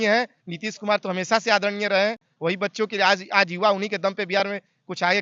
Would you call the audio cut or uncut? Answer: uncut